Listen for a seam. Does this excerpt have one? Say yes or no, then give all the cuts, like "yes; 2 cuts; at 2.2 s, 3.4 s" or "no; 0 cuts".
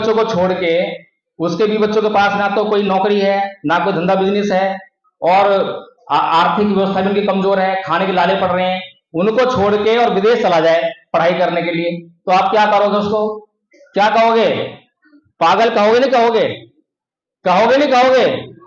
no; 0 cuts